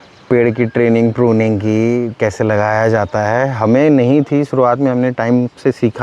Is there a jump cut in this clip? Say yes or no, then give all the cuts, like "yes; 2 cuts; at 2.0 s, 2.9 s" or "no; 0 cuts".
no; 0 cuts